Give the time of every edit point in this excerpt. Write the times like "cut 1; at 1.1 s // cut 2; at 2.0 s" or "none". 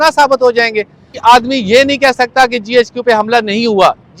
cut 1; at 1.2 s